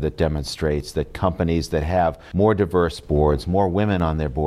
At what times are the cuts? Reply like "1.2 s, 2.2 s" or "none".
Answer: 2.2 s